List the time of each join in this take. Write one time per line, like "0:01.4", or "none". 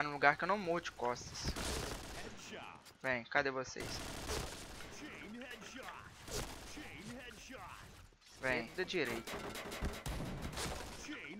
0:08.7